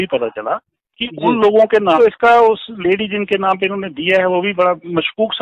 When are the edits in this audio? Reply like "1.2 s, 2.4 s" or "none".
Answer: 2.0 s